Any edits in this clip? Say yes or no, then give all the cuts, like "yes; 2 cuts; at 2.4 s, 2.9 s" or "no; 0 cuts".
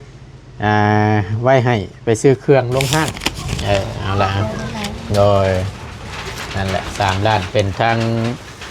yes; 1 cut; at 3.2 s